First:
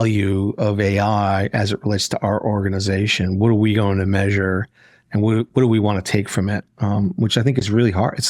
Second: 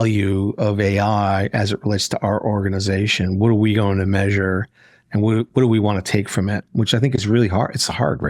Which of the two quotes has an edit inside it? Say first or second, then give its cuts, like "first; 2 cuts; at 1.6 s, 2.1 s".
second; 1 cut; at 6.7 s